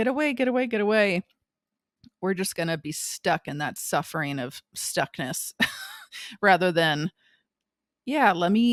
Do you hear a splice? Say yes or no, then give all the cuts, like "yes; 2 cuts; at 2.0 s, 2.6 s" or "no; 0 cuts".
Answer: no; 0 cuts